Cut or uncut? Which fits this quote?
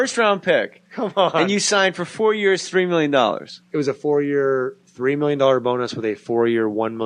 cut